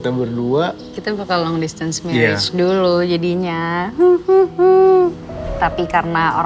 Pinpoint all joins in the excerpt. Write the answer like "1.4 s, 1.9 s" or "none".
5.5 s